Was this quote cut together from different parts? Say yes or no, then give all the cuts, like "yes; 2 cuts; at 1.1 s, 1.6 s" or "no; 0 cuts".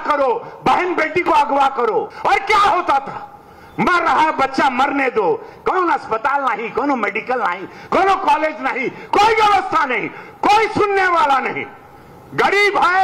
yes; 1 cut; at 2.1 s